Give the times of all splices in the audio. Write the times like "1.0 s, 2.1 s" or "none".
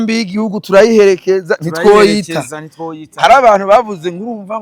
none